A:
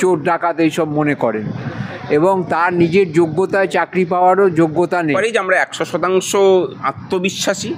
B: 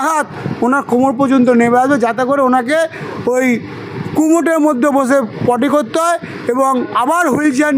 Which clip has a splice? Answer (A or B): A